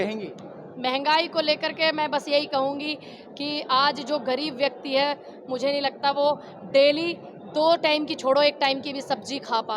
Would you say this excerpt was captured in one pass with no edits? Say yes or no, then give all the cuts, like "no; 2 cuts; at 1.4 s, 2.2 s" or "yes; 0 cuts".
yes; 0 cuts